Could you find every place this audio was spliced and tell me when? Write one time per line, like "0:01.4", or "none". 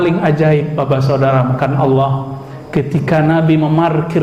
none